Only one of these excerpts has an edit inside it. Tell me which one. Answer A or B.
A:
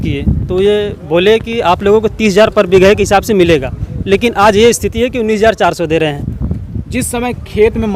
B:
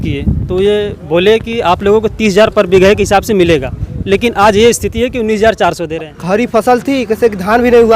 B